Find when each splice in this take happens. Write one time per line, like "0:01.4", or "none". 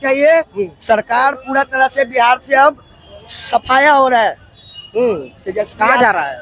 none